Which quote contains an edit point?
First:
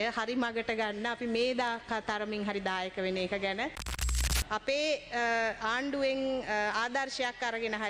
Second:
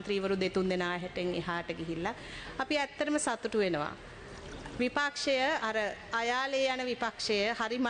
first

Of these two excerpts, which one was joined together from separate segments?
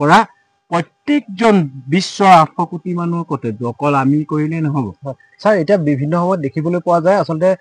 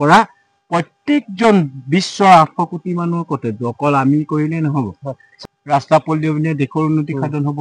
second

